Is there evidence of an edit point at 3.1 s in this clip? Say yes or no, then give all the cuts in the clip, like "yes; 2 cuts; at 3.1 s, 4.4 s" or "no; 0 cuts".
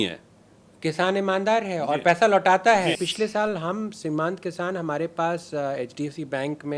yes; 1 cut; at 3.1 s